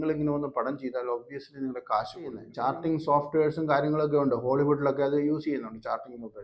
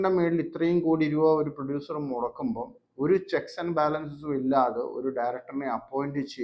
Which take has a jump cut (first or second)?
first